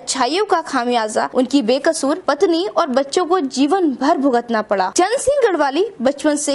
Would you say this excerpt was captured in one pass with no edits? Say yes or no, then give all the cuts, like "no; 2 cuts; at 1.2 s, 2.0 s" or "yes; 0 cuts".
yes; 0 cuts